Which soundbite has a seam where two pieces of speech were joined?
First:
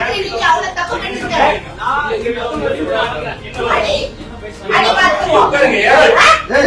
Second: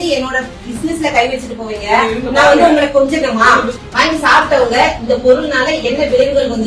second; 1 cut; at 3.8 s

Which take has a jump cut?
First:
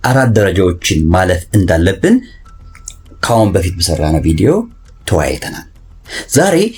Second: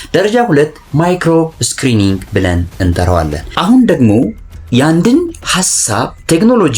second; 1 cut; at 3.4 s

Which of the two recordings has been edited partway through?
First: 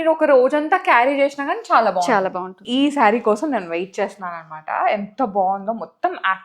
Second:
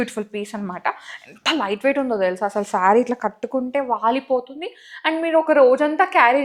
first; 1 cut; at 2.6 s

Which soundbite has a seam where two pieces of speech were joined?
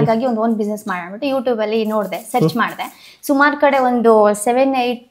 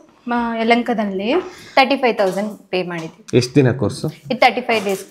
second; 1 cut; at 1.6 s

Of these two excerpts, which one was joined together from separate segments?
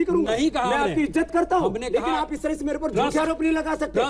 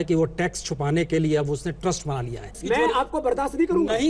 second; 1 cut; at 2.6 s

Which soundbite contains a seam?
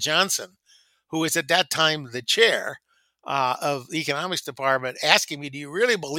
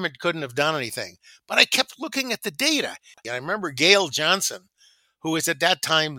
second; 1 cut; at 3.2 s

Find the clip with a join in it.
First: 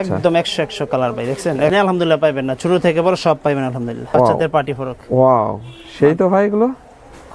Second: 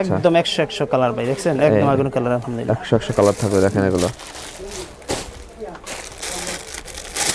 first; 2 cuts; at 1.7 s, 4.0 s

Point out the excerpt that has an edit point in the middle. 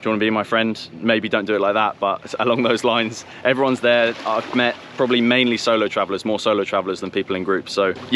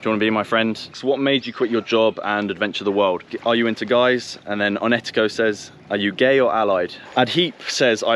second; 3 cuts; at 0.9 s, 3.3 s, 7.0 s

